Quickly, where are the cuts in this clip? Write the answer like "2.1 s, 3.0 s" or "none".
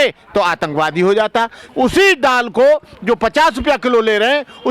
1.6 s